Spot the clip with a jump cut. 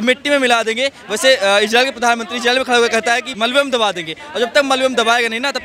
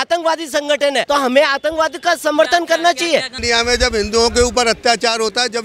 first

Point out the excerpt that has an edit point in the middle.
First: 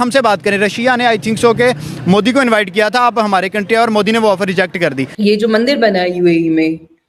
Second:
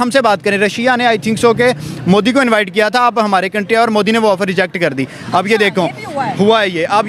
first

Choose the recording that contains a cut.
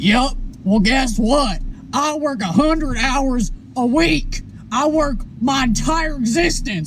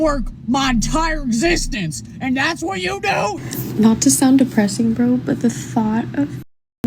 second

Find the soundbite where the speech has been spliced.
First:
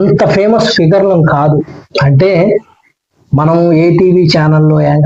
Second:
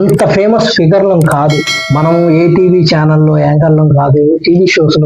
second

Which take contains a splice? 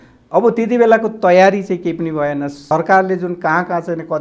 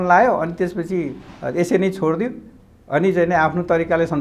first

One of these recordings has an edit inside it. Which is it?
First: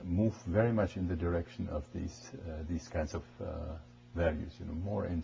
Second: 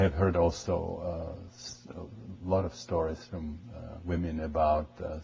first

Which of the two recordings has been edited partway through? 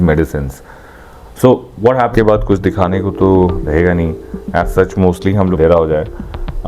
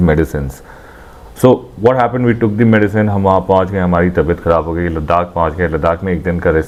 first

